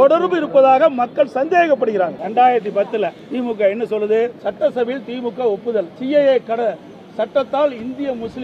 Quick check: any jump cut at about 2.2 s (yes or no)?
yes